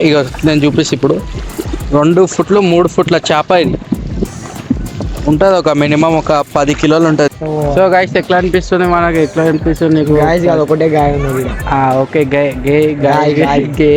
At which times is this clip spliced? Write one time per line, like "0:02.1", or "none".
0:07.3